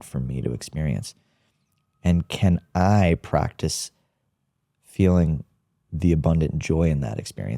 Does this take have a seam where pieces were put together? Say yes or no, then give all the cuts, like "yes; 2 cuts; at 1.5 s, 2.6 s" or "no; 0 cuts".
no; 0 cuts